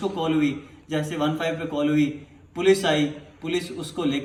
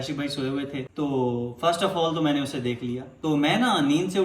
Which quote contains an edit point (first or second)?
second